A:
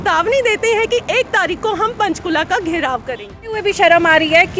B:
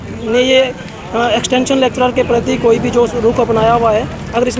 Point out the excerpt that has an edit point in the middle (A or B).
A